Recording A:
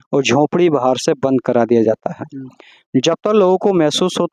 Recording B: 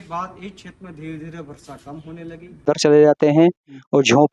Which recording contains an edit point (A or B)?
B